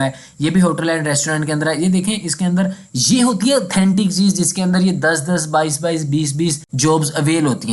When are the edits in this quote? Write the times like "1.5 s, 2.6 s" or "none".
6.7 s